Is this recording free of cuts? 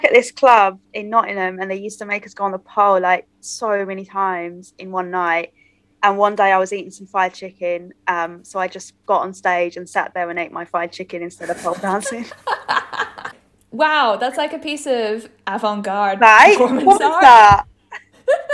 yes; 0 cuts

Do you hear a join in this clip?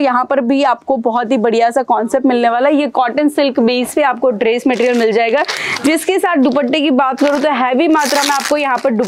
no; 0 cuts

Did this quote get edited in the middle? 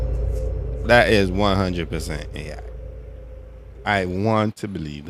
no; 0 cuts

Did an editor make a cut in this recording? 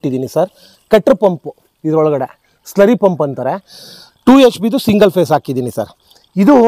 no; 0 cuts

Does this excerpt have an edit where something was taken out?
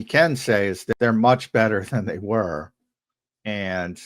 yes; 1 cut; at 0.9 s

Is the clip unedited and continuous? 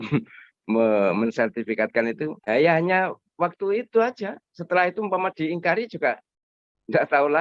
no; 1 cut; at 2.4 s

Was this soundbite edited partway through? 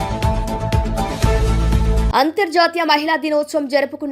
yes; 1 cut; at 2.1 s

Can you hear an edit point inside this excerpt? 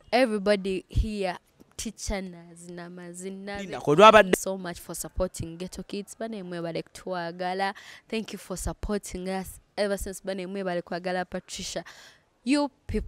yes; 1 cut; at 4.3 s

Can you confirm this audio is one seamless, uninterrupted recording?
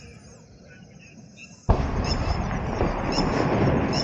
yes; 0 cuts

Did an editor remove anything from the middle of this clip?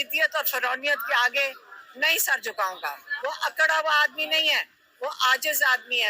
yes; 1 cut; at 3.1 s

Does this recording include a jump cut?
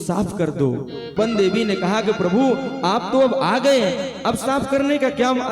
yes; 1 cut; at 1.1 s

